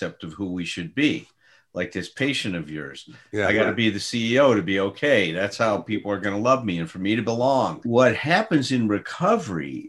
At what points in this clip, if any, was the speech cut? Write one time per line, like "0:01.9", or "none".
0:07.8